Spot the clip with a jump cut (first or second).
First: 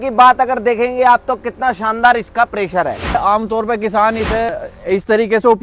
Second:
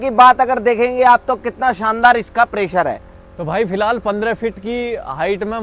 first